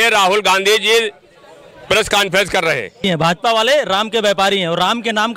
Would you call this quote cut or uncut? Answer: cut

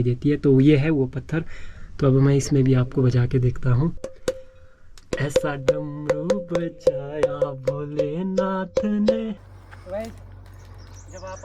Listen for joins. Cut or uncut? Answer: cut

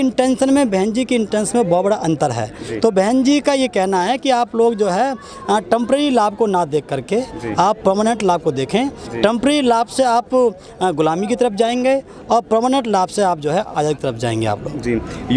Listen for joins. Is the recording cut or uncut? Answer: uncut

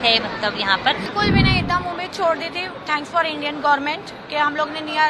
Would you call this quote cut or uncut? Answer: cut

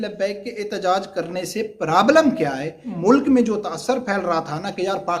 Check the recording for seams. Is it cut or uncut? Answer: cut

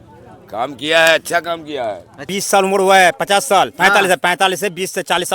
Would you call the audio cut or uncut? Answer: cut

